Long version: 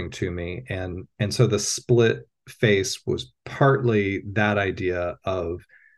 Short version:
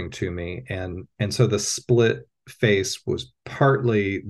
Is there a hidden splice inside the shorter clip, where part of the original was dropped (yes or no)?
no